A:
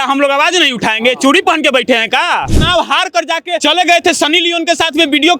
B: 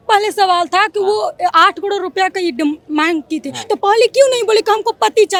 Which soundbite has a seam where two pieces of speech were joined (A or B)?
A